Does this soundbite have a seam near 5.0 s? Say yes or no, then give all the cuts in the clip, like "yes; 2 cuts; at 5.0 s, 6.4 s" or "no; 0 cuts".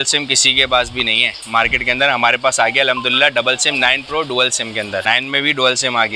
yes; 1 cut; at 5.0 s